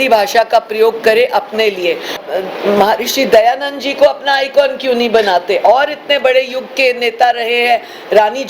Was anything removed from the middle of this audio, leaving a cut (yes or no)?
yes